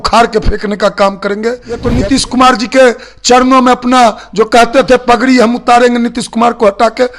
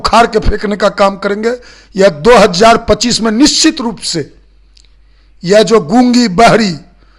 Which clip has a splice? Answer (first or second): first